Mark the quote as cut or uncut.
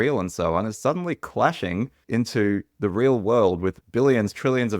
cut